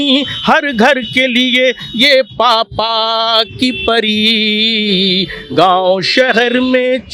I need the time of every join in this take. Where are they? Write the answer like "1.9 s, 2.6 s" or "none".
none